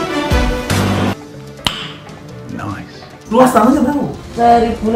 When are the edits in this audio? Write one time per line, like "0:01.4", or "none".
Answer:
0:03.2